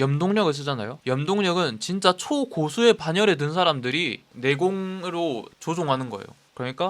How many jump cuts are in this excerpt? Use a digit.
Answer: 1